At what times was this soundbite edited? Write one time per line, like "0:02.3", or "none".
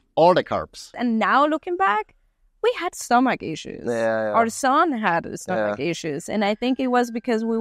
0:00.9

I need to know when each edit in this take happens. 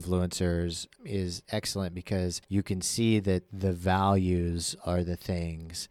0:01.2
0:02.4

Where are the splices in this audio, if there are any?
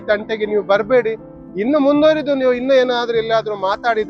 none

